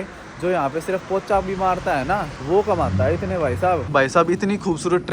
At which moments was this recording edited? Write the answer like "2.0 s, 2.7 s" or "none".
2.3 s, 3.9 s